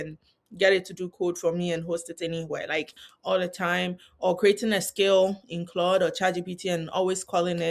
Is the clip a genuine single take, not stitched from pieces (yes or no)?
no